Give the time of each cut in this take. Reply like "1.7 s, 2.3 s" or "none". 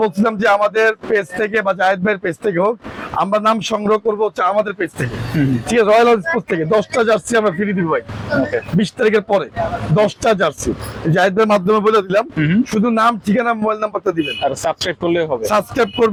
none